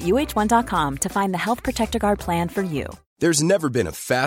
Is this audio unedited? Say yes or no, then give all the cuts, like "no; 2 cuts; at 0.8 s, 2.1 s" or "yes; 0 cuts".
no; 1 cut; at 3.0 s